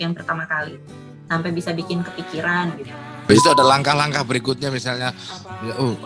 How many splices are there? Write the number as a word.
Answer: one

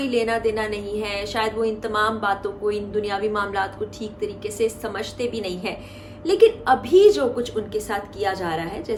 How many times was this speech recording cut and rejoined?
zero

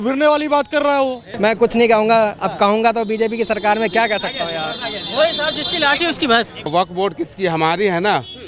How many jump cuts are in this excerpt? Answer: two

